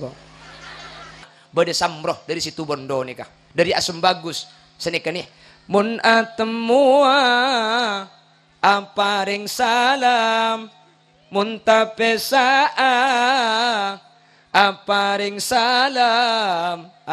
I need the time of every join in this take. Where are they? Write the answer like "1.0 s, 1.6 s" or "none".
1.3 s